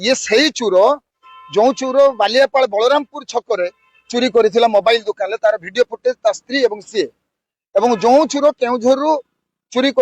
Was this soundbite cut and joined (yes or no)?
no